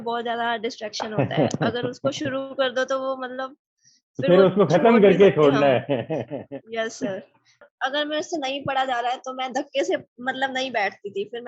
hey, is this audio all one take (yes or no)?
no